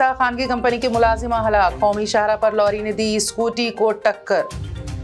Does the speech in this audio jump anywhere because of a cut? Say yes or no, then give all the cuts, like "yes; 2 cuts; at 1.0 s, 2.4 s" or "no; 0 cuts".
no; 0 cuts